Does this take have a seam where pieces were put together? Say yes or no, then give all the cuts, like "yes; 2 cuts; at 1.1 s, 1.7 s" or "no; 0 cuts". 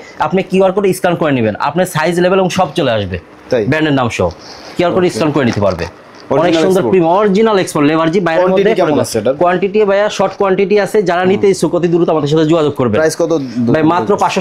no; 0 cuts